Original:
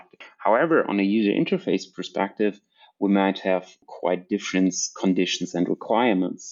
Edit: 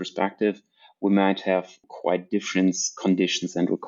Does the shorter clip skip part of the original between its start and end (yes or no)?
no